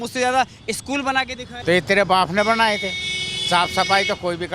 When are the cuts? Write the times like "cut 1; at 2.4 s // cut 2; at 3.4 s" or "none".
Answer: cut 1; at 1.5 s